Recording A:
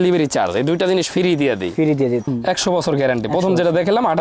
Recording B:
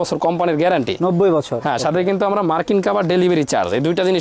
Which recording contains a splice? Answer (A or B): A